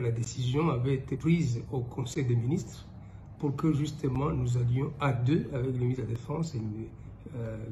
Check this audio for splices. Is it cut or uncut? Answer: cut